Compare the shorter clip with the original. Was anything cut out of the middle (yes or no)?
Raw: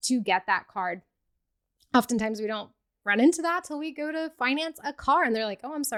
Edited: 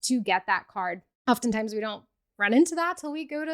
yes